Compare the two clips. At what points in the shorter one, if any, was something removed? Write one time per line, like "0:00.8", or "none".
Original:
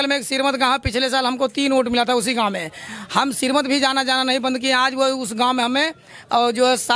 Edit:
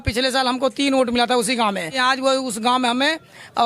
0:01.9